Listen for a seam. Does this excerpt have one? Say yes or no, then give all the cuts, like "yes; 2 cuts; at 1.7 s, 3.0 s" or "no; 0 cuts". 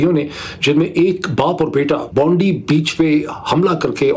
yes; 1 cut; at 2.1 s